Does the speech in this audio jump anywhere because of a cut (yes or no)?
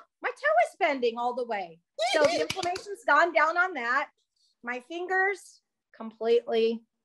no